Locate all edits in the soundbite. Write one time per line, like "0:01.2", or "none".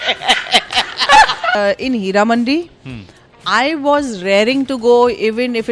0:01.5